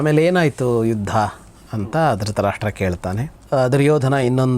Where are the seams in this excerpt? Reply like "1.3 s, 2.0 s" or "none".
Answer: 3.3 s